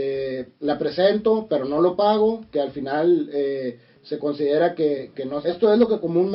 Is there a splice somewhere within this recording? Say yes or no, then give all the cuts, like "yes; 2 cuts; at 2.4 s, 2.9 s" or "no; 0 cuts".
yes; 1 cut; at 5.2 s